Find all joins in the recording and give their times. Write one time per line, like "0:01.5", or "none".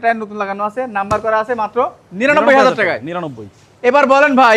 none